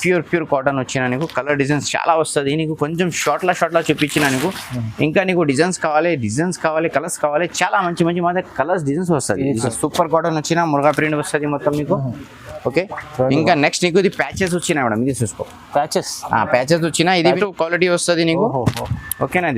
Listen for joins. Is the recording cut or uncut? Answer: cut